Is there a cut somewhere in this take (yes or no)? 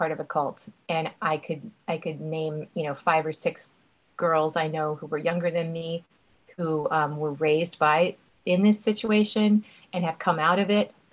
no